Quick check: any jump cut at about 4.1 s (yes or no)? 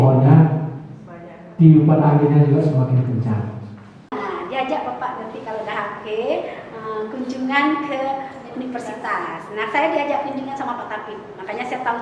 yes